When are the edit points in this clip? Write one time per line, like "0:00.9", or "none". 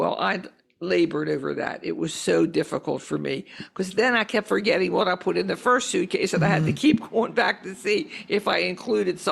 none

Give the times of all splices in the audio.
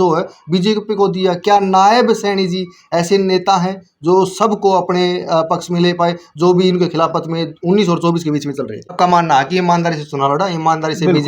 0:08.9

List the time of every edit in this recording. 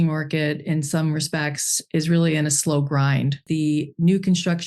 0:03.4

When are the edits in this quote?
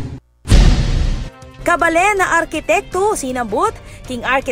0:01.6

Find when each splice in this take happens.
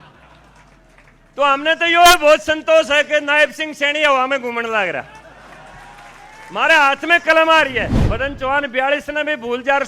0:08.0

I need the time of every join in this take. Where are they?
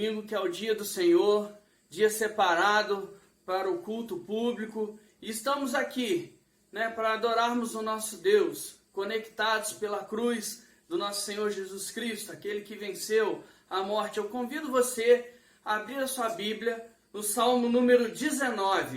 0:13.2

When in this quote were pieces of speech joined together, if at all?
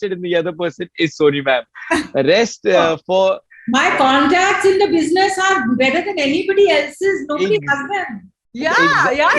none

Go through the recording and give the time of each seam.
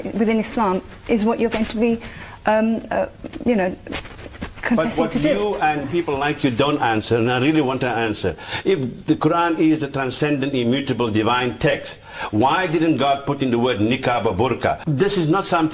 0:14.8

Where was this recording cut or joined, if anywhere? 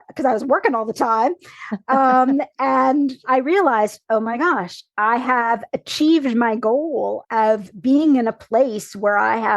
0:03.2
0:07.2

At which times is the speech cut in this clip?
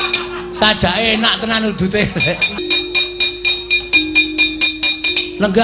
0:02.6

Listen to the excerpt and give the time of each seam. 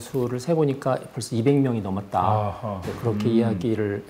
none

